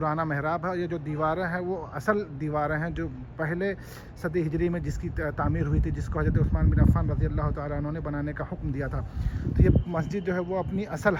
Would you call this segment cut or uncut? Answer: uncut